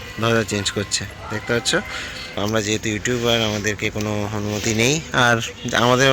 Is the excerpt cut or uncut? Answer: cut